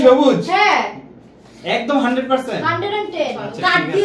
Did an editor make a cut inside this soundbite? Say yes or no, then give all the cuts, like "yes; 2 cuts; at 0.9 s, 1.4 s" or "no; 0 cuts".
no; 0 cuts